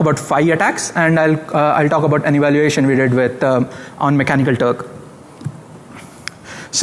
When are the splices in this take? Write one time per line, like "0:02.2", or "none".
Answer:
none